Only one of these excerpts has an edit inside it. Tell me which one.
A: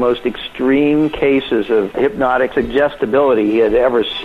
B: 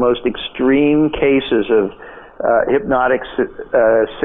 A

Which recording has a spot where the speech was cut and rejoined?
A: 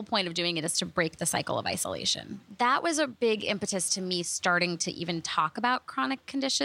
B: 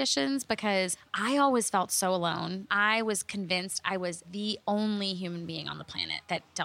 B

